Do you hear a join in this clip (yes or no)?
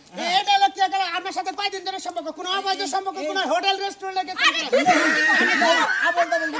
no